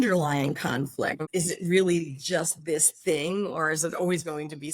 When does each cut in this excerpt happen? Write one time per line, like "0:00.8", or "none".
0:01.2